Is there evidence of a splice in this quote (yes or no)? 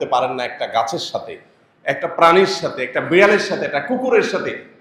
no